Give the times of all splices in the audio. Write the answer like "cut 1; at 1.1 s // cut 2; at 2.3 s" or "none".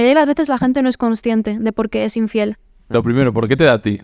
cut 1; at 2.9 s